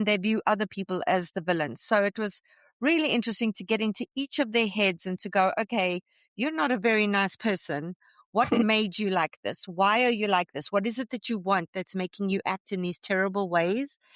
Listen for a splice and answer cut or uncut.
uncut